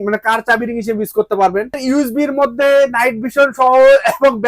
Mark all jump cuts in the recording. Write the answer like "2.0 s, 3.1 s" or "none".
1.8 s